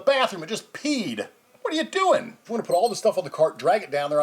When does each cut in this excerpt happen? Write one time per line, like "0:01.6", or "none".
0:02.4